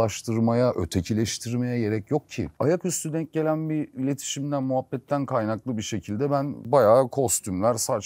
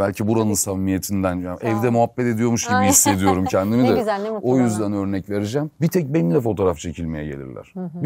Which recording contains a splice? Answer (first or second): first